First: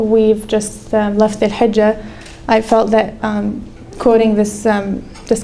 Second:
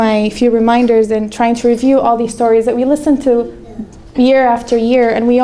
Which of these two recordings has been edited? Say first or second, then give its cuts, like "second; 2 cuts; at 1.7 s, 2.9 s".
second; 1 cut; at 1.7 s